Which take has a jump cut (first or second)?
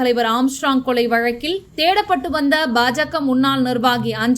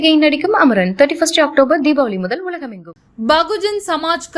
second